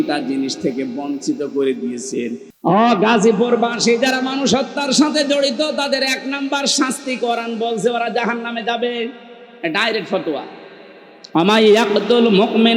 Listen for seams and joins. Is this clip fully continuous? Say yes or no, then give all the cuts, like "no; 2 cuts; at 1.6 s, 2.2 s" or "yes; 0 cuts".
no; 1 cut; at 2.5 s